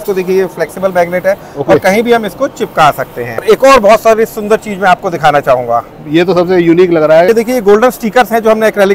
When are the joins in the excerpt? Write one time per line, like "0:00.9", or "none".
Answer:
0:03.4
0:07.3